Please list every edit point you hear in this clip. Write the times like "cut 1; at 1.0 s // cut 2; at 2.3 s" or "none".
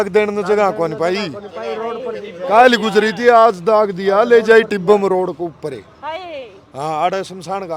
none